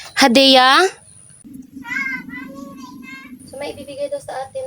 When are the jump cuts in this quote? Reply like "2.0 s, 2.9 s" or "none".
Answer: 3.4 s